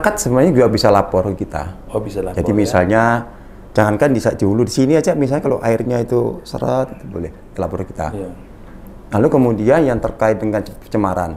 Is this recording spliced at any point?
no; 0 cuts

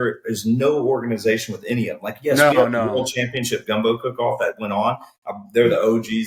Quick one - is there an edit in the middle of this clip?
no; 0 cuts

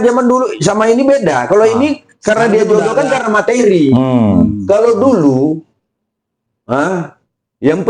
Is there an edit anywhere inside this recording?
no; 0 cuts

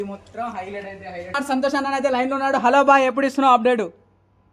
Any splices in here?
yes; 1 cut; at 1.4 s

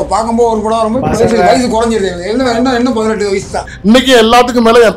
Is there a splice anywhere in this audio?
yes; 1 cut; at 3.7 s

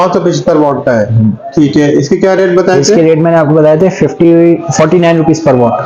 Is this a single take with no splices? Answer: yes; 0 cuts

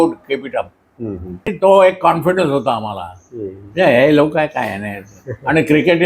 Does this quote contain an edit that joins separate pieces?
yes; 1 cut; at 1.5 s

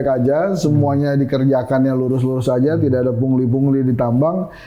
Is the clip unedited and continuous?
yes; 0 cuts

